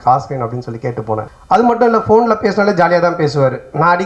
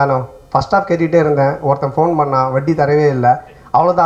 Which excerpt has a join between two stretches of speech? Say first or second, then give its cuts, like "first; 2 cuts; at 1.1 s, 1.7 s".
first; 1 cut; at 1.3 s